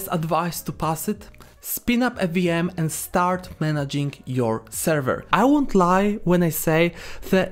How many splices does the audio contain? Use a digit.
1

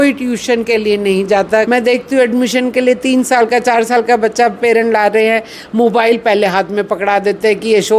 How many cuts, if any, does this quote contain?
1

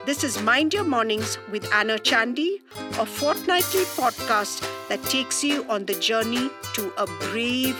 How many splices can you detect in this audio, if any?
0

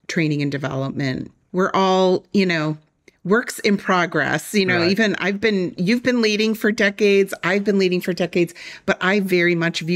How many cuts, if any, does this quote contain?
1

